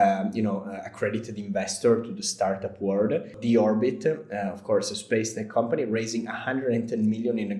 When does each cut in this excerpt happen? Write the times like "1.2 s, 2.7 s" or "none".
3.3 s